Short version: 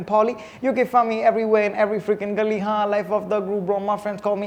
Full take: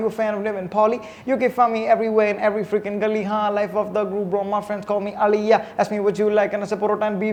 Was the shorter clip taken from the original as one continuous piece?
yes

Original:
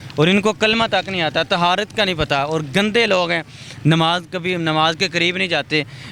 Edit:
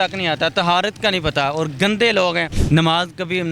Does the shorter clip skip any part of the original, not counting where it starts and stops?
yes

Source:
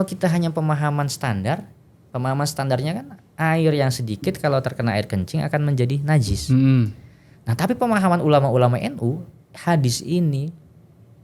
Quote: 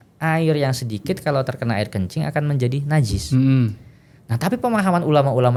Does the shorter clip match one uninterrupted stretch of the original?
yes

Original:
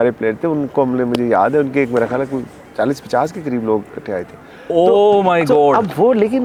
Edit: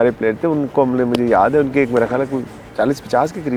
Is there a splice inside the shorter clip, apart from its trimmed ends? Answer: no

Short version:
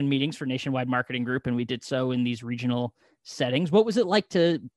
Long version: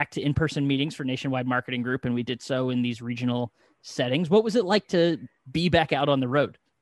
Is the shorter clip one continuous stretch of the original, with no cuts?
yes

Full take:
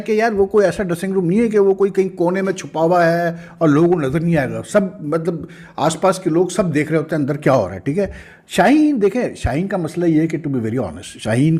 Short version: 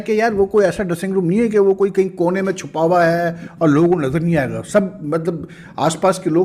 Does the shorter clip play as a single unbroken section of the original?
yes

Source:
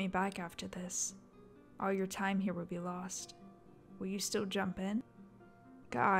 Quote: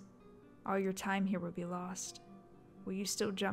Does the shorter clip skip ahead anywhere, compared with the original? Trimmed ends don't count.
no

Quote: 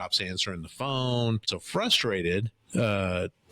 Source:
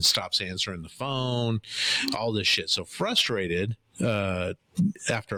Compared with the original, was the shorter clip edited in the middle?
yes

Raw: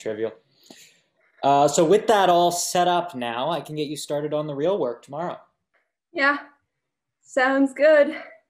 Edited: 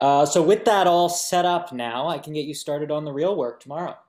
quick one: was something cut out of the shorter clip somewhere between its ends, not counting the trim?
no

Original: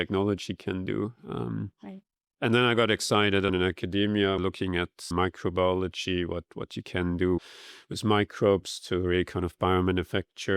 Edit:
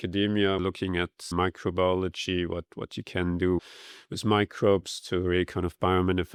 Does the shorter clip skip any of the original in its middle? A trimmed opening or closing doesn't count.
no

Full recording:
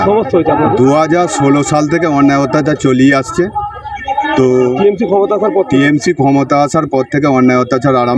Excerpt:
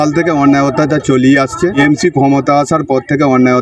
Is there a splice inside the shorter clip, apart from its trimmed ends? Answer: yes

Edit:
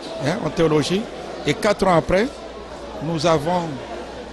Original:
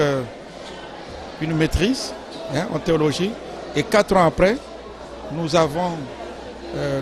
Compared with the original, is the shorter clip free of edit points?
yes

